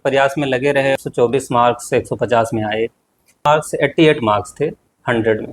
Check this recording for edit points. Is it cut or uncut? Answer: cut